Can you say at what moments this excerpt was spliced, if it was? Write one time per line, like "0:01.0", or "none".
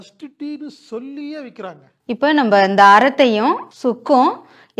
0:01.9